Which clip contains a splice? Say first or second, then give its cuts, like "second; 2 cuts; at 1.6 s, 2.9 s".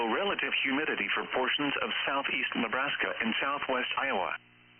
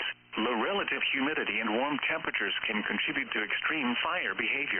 first; 1 cut; at 0.9 s